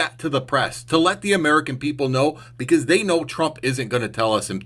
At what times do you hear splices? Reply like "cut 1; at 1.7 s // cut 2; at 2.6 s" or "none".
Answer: none